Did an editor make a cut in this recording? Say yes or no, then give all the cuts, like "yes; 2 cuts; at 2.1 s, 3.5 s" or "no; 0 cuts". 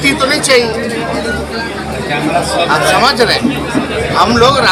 no; 0 cuts